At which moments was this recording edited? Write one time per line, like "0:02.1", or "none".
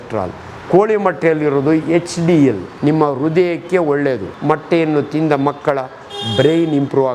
0:02.7
0:04.3